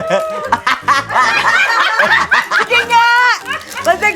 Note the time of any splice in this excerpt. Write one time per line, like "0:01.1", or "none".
0:02.0